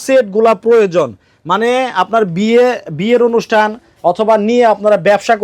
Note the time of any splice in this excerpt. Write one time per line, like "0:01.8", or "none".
none

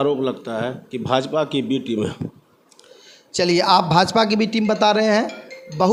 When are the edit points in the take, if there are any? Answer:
none

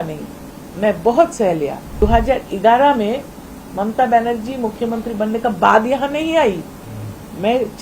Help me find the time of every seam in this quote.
0:01.8

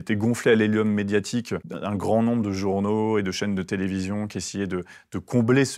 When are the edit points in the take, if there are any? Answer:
0:01.7

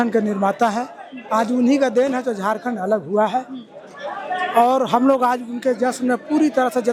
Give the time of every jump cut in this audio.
none

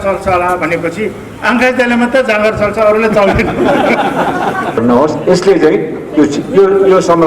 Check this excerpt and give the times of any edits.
0:04.8

